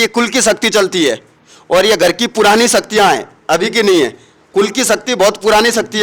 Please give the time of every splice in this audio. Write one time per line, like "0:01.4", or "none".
none